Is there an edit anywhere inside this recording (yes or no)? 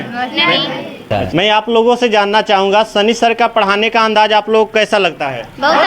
yes